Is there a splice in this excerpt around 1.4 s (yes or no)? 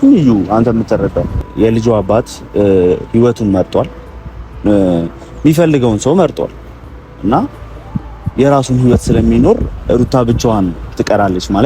yes